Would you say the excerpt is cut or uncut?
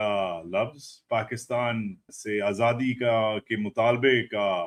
uncut